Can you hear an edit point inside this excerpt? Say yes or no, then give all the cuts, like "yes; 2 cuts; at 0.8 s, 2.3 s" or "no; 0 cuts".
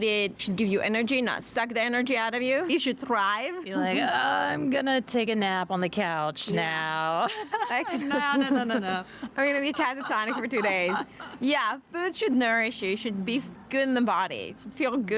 no; 0 cuts